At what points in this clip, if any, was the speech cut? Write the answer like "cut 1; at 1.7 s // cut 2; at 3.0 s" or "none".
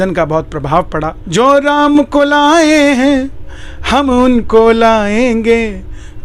cut 1; at 1.2 s